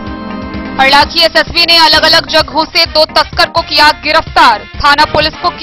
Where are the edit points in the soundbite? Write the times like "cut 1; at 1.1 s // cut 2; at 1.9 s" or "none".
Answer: none